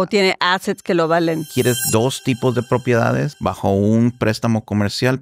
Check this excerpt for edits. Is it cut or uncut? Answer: cut